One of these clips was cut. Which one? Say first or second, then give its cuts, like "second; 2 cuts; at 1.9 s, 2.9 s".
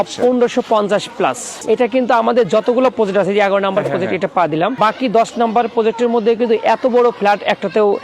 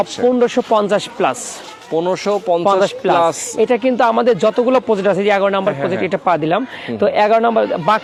first; 2 cuts; at 1.5 s, 4.8 s